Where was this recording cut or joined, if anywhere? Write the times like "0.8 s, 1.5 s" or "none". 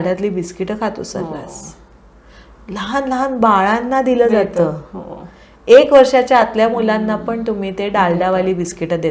none